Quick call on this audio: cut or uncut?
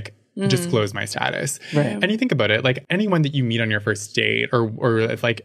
uncut